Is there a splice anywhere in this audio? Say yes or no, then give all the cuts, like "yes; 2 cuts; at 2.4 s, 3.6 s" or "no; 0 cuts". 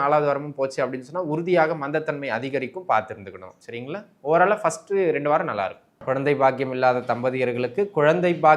yes; 1 cut; at 5.9 s